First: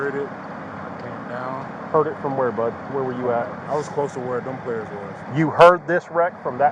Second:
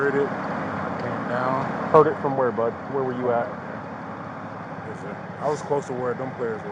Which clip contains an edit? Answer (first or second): first